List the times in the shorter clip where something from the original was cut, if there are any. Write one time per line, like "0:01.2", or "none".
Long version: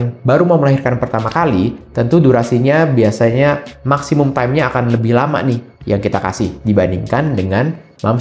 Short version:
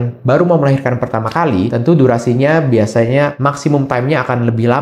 0:01.7
0:03.4